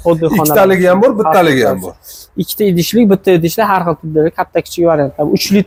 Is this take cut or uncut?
uncut